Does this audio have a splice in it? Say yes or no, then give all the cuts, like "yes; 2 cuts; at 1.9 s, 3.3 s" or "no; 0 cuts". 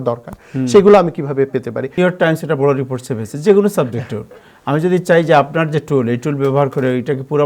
yes; 1 cut; at 2.0 s